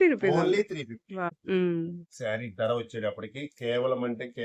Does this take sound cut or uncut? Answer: cut